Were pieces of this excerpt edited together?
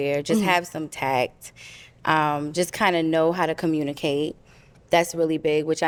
no; 0 cuts

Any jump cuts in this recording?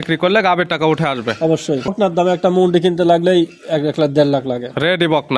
yes; 1 cut; at 1.9 s

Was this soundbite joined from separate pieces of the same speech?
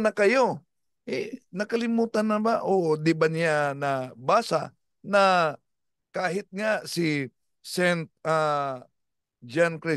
no; 0 cuts

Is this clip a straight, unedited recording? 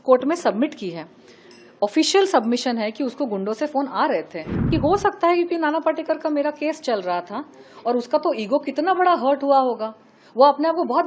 no; 1 cut; at 4.7 s

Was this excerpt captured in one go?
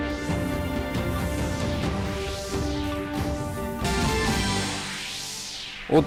yes; 0 cuts

